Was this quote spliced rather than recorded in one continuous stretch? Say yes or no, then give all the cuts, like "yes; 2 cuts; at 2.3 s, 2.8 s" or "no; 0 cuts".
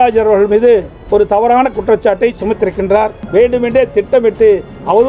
yes; 2 cuts; at 1.0 s, 3.2 s